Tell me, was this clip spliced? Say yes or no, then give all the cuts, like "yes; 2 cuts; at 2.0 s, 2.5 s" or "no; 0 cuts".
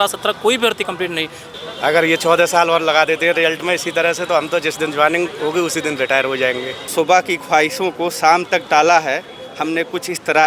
yes; 2 cuts; at 1.4 s, 6.8 s